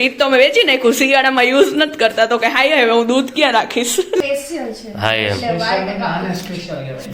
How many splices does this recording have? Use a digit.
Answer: 1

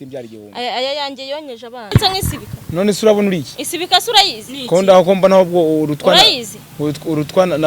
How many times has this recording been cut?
1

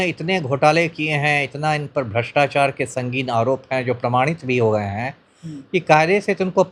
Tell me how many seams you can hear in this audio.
0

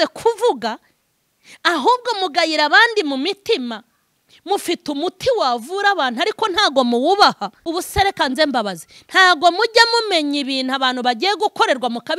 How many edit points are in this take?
1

